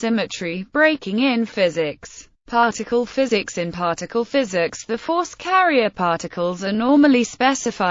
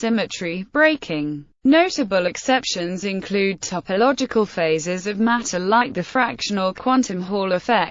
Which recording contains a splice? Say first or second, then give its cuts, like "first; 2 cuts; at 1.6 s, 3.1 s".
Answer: first; 1 cut; at 1.1 s